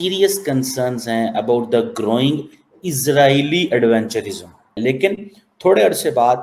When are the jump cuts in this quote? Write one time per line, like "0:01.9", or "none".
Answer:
0:04.6